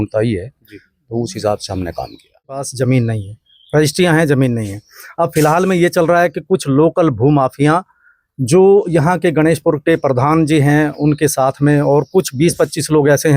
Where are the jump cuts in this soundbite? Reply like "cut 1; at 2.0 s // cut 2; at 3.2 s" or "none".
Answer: cut 1; at 2.7 s